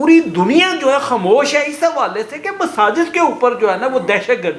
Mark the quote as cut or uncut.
uncut